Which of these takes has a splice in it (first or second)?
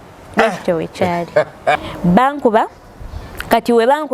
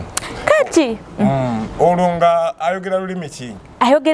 first